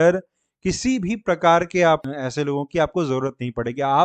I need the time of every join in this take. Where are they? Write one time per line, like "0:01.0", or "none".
0:02.1